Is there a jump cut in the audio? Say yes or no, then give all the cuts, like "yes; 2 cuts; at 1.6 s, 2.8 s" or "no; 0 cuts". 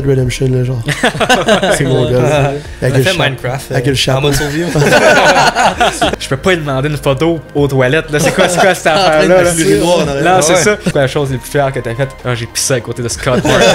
yes; 2 cuts; at 6.1 s, 10.9 s